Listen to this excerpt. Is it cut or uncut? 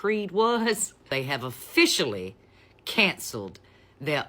cut